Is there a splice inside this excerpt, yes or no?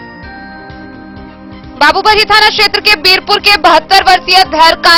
no